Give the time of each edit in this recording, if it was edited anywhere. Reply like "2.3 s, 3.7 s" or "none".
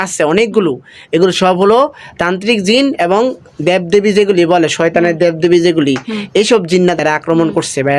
7.0 s